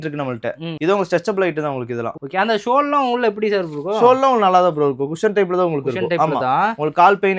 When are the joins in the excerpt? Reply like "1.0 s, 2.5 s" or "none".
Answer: none